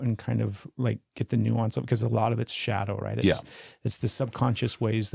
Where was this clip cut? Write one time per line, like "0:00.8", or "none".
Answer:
none